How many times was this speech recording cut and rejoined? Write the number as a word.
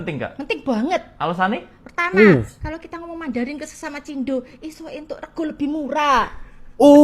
zero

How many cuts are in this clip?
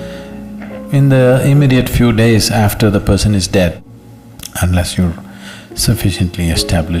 one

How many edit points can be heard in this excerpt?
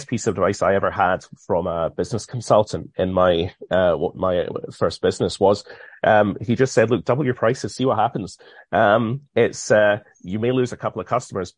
zero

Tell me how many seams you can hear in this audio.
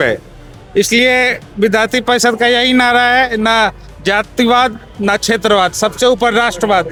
zero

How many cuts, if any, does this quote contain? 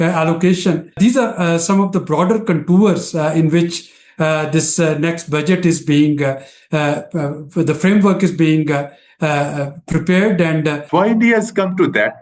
two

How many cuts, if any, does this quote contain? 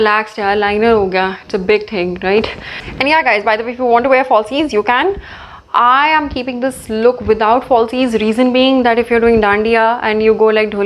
one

